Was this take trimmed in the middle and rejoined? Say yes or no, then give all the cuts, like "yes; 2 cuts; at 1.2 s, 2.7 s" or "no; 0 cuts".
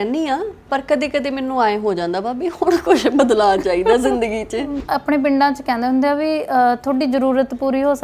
yes; 1 cut; at 4.8 s